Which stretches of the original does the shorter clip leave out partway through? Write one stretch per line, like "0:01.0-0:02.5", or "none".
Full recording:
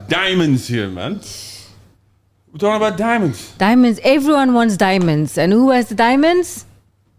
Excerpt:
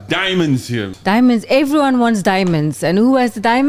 0:00.9-0:03.5

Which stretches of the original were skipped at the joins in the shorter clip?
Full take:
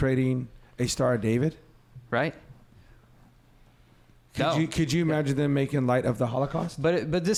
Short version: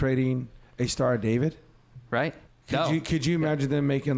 0:02.5-0:04.2

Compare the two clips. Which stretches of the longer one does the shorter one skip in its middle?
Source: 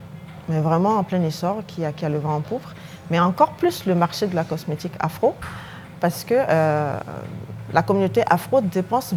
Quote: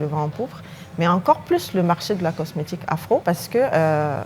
0:05.3-0:06.0

